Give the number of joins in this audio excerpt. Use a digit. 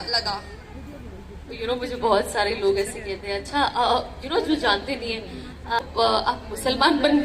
1